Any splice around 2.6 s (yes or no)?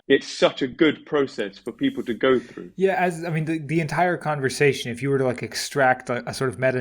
yes